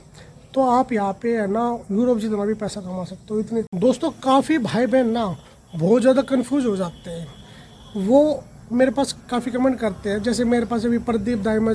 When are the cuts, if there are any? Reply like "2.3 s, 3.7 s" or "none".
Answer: 3.7 s